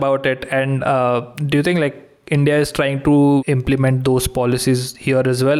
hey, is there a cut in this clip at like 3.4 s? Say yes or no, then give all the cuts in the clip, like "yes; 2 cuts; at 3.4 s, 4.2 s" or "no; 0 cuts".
yes; 1 cut; at 3.4 s